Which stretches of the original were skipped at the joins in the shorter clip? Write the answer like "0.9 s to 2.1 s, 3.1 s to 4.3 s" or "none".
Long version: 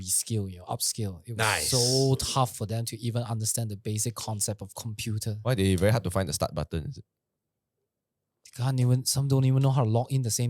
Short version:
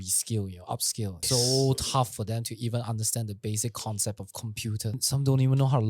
1.2 s to 1.6 s, 5.4 s to 9.0 s